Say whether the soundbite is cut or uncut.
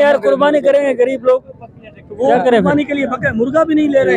uncut